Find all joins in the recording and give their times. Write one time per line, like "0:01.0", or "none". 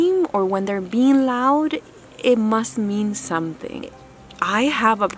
0:04.0